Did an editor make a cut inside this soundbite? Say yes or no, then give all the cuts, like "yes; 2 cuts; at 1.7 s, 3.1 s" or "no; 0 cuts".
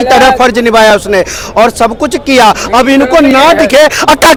no; 0 cuts